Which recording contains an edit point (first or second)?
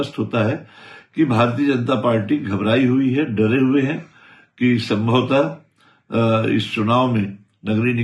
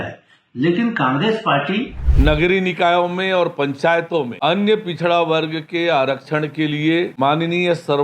second